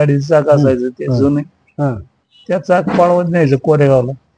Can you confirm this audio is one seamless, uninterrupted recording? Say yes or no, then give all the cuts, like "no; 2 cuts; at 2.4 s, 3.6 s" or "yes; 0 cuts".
yes; 0 cuts